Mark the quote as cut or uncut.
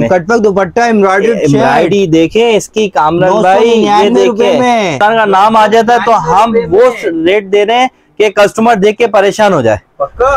cut